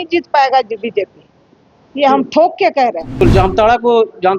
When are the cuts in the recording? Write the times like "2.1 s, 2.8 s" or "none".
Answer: 3.2 s